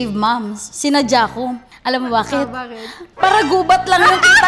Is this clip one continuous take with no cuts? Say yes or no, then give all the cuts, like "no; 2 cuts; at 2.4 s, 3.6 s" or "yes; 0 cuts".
yes; 0 cuts